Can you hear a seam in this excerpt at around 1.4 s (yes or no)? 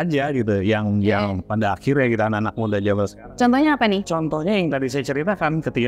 no